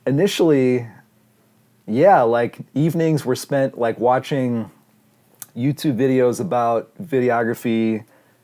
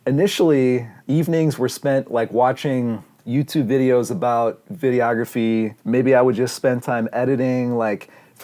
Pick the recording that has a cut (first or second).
second